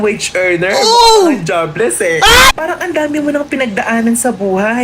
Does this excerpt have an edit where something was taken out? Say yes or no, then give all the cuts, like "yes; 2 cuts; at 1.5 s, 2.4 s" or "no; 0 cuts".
yes; 1 cut; at 2.5 s